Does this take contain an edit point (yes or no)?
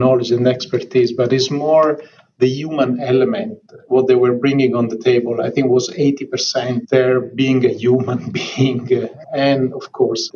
yes